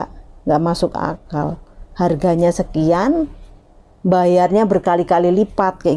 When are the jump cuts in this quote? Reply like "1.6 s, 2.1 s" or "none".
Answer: none

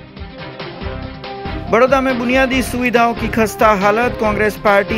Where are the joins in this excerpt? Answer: 1.3 s

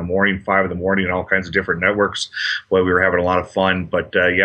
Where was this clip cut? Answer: 2.1 s

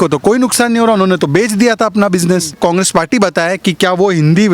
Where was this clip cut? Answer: 2.6 s

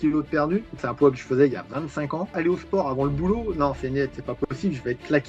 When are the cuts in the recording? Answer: 0.8 s, 2.3 s

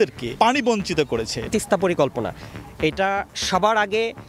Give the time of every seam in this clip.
1.5 s

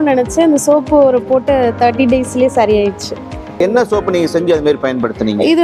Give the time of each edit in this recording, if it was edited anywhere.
3.6 s

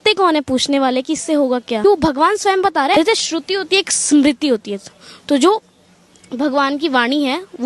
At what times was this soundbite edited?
1.8 s, 2.9 s

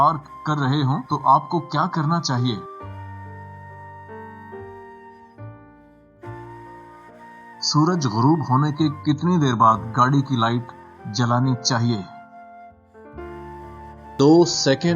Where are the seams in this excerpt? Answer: 2.8 s, 7.6 s, 12.1 s, 14.2 s

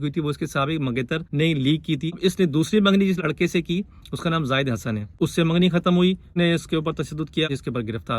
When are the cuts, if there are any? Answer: 1.3 s, 2.2 s, 5.2 s, 6.3 s, 7.5 s

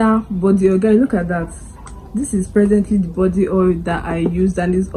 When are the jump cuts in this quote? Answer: none

